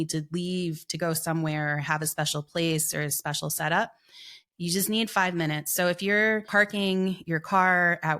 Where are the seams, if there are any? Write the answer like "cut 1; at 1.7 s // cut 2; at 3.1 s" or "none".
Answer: cut 1; at 4.4 s // cut 2; at 6.5 s